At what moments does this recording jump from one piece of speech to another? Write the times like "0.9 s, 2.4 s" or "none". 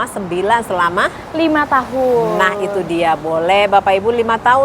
none